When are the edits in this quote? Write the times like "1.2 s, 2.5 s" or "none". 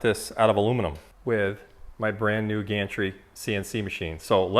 1.1 s